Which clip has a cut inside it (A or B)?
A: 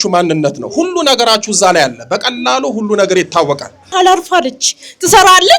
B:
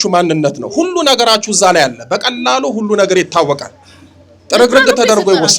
A